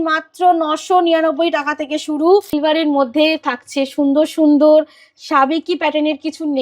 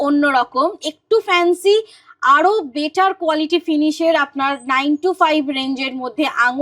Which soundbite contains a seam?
first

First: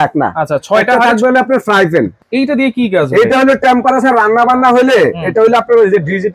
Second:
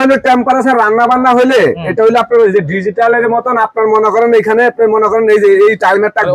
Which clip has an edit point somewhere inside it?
first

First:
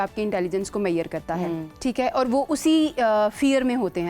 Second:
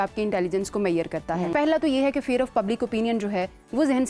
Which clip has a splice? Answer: second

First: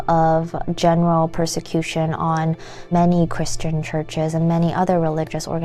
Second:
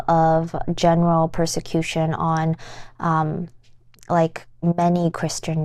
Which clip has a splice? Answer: first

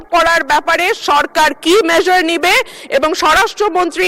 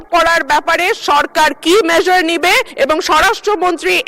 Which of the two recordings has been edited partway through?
second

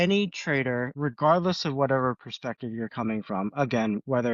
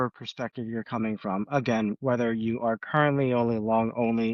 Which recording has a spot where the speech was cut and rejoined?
first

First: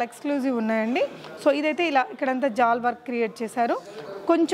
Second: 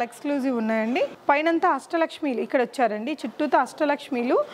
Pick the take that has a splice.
second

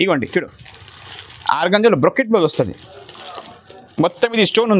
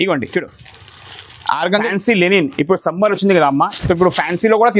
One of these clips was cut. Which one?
second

